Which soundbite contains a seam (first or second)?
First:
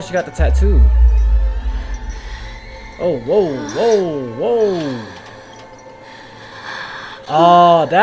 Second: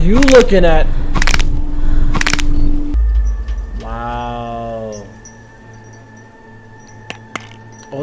second